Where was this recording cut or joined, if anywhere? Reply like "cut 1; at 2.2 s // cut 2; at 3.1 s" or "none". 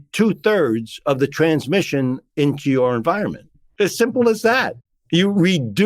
cut 1; at 3.6 s